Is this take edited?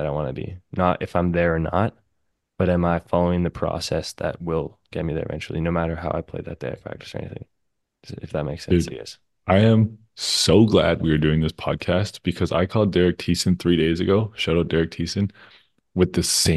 no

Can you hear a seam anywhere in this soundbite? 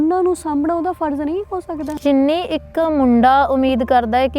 yes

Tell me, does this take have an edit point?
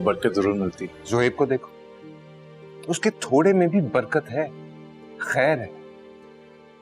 yes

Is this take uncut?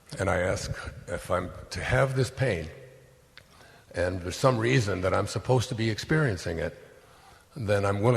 yes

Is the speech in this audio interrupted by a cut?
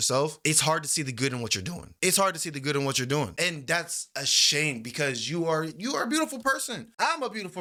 no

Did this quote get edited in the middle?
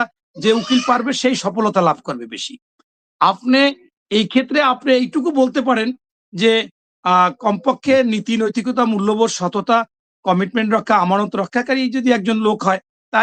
no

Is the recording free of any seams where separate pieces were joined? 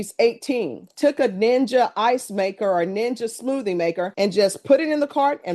no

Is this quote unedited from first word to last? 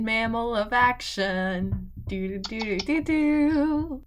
yes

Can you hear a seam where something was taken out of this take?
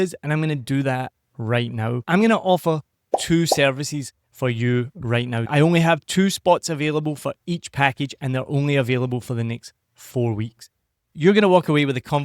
yes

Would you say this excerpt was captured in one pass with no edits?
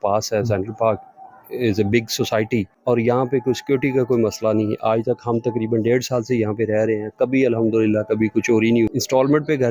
no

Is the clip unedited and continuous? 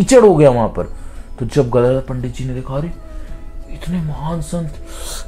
yes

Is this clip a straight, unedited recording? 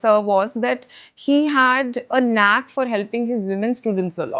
yes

